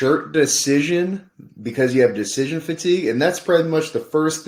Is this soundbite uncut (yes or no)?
yes